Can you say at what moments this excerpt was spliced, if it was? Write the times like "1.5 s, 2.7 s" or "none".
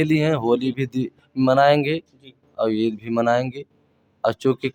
none